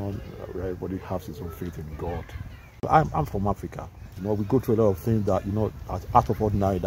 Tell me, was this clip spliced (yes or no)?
yes